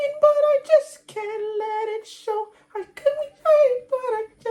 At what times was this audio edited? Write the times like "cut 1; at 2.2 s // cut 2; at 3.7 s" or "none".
none